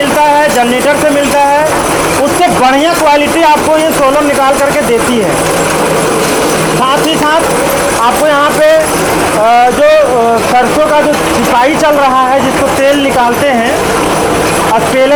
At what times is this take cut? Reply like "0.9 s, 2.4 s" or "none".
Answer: none